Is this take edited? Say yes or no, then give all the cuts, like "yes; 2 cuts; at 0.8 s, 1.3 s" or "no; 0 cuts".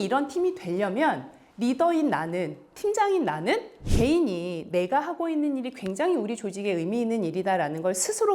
yes; 1 cut; at 3.8 s